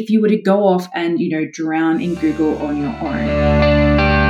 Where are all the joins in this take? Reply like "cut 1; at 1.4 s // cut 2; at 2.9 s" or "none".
cut 1; at 3.3 s